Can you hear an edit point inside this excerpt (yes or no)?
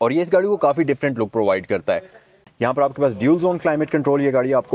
yes